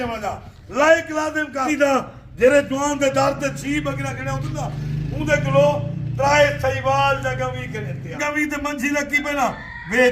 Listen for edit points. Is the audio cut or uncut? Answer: cut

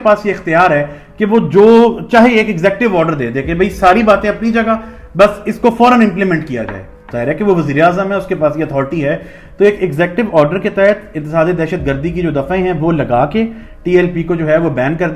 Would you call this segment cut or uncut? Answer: uncut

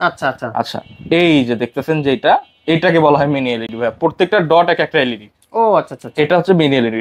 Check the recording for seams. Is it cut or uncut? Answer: uncut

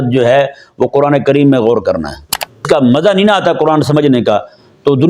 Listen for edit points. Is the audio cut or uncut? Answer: cut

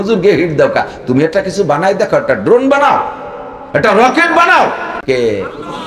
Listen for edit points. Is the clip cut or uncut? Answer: cut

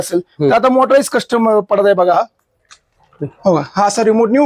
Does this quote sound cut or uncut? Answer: uncut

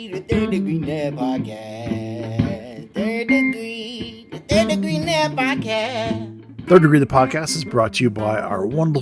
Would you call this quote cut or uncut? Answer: cut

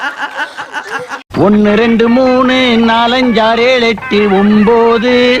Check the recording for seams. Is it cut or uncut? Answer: cut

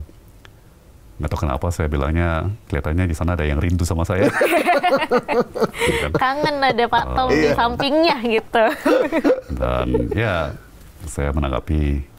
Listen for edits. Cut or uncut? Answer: uncut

